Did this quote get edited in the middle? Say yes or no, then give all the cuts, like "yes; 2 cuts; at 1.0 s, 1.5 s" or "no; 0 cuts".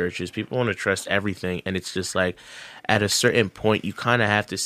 no; 0 cuts